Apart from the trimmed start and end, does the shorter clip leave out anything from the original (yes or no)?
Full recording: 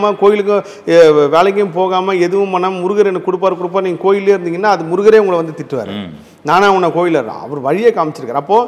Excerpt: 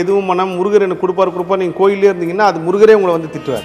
no